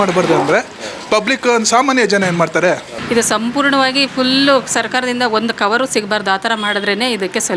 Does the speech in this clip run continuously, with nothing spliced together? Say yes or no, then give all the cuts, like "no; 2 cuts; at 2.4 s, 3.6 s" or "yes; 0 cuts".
no; 1 cut; at 2.9 s